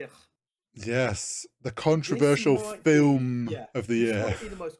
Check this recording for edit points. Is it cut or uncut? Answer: uncut